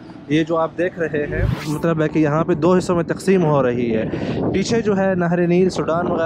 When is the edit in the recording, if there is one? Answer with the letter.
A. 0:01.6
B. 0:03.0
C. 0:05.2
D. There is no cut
A